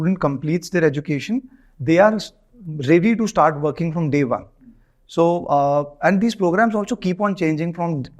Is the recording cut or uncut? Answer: uncut